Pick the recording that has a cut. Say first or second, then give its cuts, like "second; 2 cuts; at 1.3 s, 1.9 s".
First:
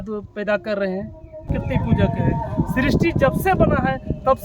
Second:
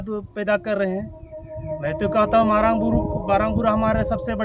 first; 1 cut; at 1.5 s